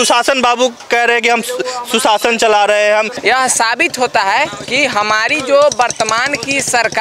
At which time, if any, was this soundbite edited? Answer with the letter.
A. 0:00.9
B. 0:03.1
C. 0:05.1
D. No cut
B